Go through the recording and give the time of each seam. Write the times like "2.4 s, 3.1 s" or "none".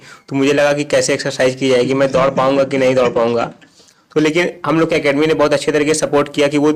none